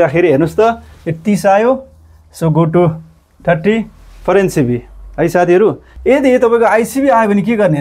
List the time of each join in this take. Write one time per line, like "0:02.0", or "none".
0:05.9